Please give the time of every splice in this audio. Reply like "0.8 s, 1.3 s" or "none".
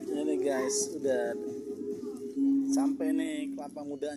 none